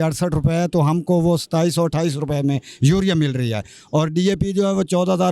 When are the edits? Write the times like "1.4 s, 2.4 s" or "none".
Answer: none